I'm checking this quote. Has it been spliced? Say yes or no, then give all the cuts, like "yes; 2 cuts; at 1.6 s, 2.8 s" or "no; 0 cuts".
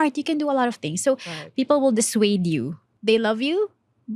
yes; 1 cut; at 2.9 s